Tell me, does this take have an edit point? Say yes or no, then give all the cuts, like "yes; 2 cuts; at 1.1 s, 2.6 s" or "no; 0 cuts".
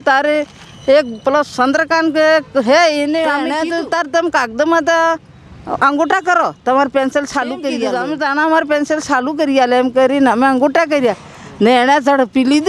yes; 2 cuts; at 3.5 s, 7.9 s